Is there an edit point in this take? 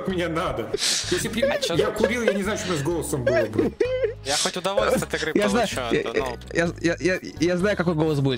no; 0 cuts

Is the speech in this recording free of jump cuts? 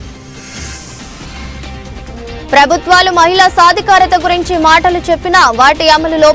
no; 2 cuts; at 1.1 s, 2.5 s

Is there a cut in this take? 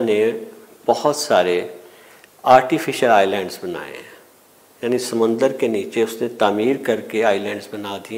no; 0 cuts

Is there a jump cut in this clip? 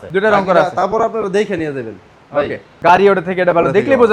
yes; 1 cut; at 2.7 s

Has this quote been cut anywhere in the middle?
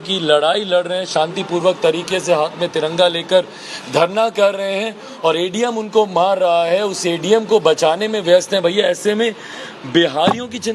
no; 0 cuts

